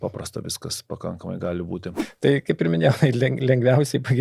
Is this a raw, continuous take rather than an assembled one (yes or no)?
no